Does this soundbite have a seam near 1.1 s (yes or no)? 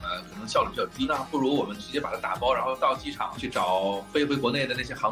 yes